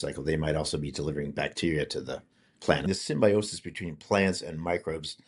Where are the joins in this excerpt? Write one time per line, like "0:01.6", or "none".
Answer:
0:02.9